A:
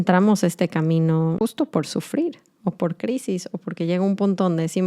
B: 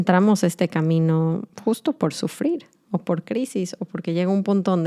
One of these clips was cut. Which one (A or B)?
A